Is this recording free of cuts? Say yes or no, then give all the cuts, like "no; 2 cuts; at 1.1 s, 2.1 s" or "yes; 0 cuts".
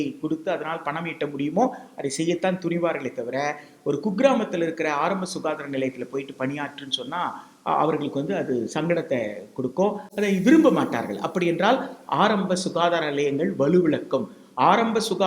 yes; 0 cuts